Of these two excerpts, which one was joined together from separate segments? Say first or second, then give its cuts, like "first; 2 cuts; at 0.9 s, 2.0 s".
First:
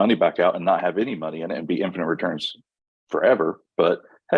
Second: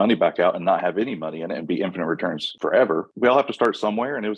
second; 1 cut; at 3.0 s